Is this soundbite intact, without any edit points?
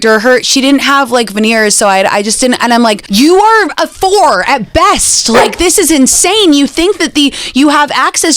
no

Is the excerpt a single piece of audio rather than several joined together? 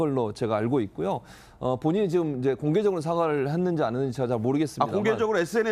no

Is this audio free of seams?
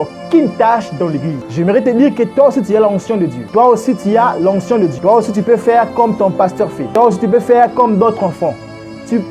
no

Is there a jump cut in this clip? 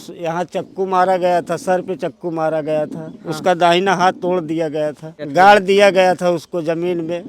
yes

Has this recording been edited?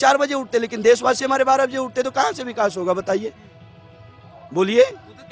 no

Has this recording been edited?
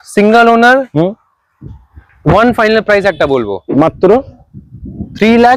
no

